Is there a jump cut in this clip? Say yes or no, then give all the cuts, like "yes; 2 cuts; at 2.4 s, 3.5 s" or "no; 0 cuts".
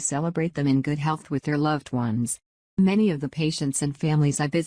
yes; 1 cut; at 2.5 s